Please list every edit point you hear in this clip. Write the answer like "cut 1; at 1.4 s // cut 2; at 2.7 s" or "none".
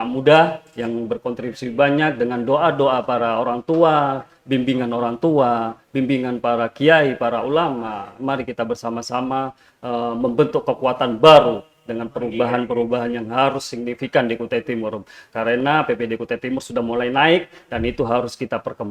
none